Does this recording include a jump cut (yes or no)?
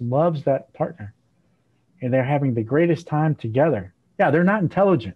no